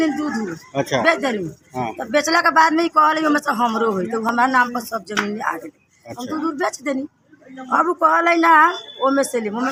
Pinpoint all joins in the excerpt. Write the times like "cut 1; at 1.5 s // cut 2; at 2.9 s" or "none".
none

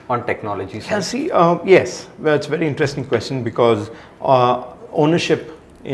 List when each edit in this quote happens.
none

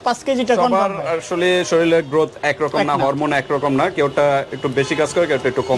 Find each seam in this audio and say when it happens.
none

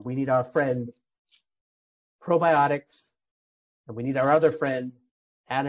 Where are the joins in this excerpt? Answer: none

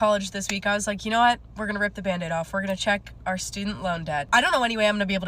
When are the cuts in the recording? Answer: cut 1; at 4.3 s

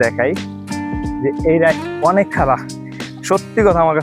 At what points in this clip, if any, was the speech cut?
cut 1; at 1.8 s

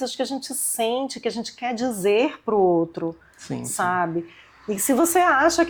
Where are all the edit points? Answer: none

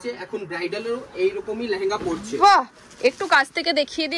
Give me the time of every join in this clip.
none

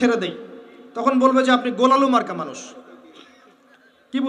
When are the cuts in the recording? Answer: none

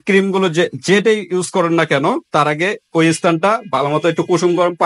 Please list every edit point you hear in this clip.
none

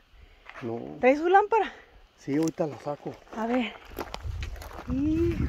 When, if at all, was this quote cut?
none

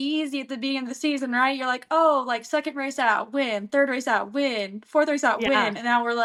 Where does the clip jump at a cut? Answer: none

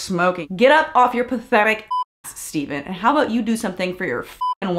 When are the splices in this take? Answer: none

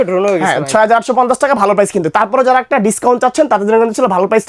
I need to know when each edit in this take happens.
none

